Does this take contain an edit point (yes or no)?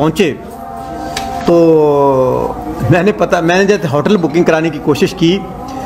yes